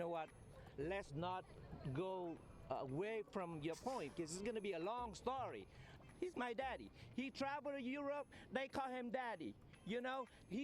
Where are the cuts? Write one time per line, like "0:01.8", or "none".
0:06.0